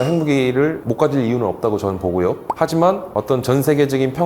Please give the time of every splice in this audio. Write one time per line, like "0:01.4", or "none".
none